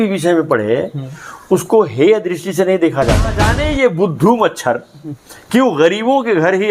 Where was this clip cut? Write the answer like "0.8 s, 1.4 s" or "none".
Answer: 3.5 s

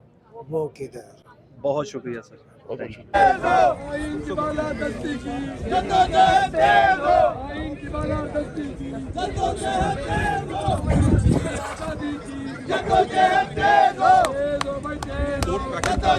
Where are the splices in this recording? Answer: none

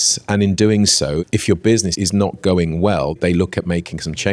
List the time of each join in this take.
1.2 s, 1.9 s, 3.2 s

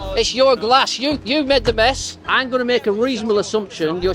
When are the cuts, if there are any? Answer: 2.3 s

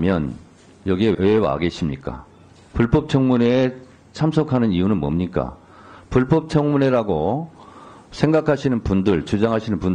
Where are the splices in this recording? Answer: 1.1 s

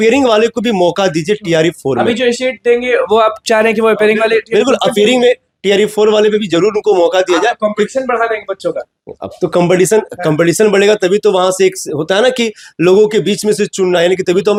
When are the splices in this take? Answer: none

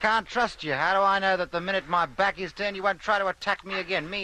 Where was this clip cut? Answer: 2.1 s

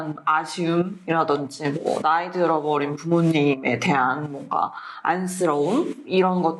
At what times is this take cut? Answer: none

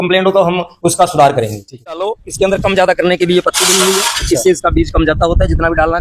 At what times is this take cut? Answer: 2.0 s

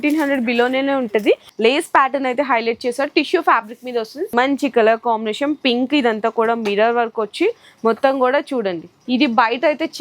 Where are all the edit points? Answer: 1.5 s, 4.3 s, 8.9 s

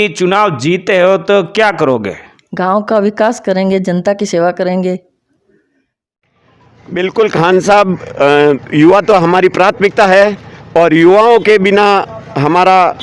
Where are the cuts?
6.0 s

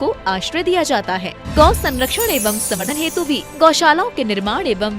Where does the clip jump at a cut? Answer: 2.8 s

